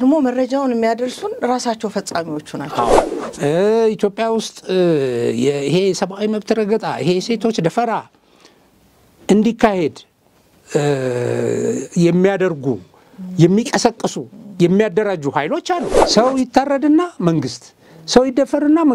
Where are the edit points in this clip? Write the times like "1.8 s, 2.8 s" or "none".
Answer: 3.1 s, 16.0 s